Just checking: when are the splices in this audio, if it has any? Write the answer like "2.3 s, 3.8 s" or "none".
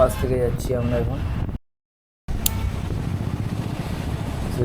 1.6 s